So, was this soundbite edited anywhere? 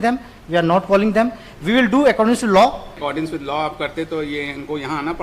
yes; 1 cut; at 3.0 s

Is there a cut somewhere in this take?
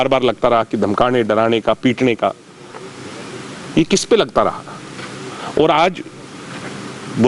no; 0 cuts

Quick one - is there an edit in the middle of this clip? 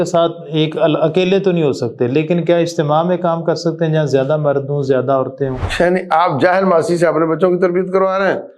yes; 1 cut; at 5.6 s

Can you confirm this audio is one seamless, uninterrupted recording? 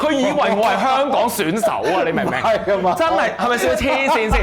yes; 0 cuts

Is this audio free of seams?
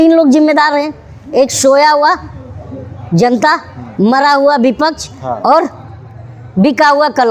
yes; 0 cuts

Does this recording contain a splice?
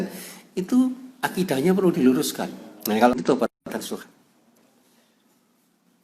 yes; 1 cut; at 3.1 s

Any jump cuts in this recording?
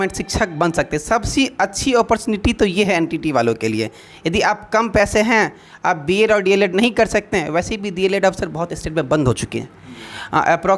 no; 0 cuts

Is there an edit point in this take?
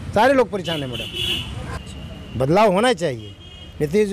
yes; 1 cut; at 1.8 s

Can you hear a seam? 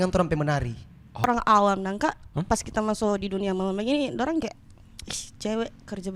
yes; 2 cuts; at 1.3 s, 2.4 s

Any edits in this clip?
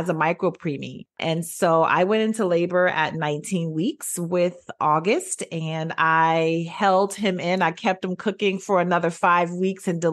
yes; 1 cut; at 1.1 s

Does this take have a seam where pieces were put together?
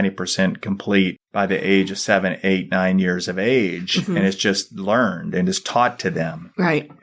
no; 0 cuts

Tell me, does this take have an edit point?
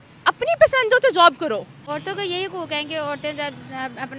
yes; 1 cut; at 1.8 s

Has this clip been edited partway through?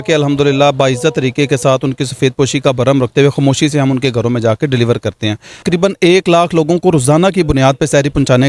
yes; 1 cut; at 5.6 s

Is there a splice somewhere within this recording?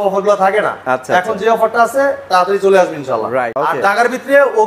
yes; 1 cut; at 3.5 s

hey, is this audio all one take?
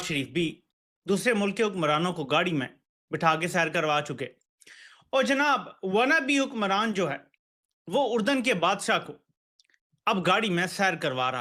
yes; 0 cuts

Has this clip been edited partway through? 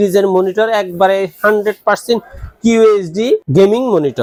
no; 0 cuts

